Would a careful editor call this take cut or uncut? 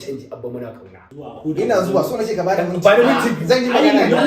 cut